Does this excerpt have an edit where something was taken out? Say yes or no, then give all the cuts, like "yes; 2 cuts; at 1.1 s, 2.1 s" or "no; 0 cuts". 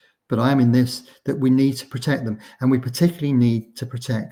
no; 0 cuts